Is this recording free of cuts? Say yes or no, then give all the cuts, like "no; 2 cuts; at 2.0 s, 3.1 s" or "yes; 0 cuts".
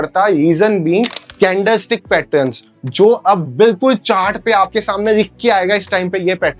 no; 1 cut; at 1.2 s